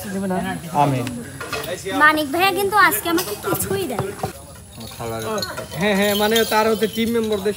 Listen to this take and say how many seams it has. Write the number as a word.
one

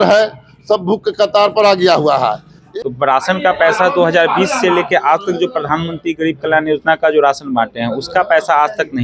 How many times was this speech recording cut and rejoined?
one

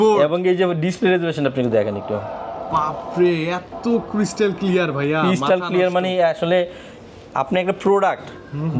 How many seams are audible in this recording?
zero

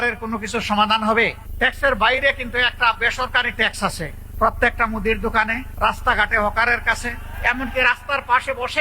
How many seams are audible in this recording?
four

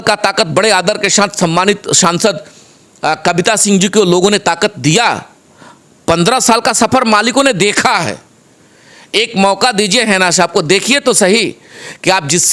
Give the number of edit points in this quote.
zero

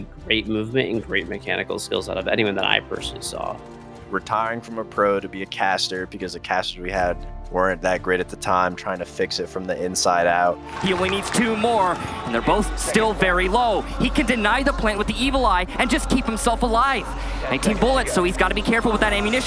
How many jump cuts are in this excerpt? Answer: two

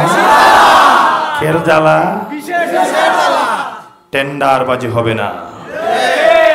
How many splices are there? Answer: zero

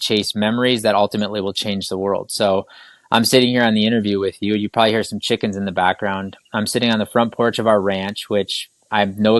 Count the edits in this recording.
zero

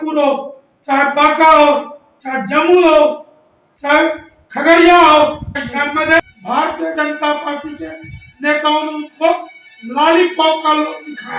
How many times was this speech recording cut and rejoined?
one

